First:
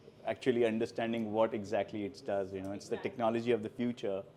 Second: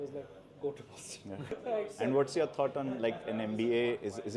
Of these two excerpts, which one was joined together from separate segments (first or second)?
second